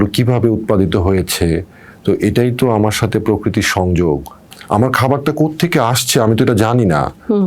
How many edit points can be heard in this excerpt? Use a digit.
1